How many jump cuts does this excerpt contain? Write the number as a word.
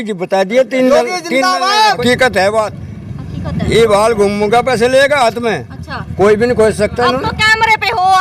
one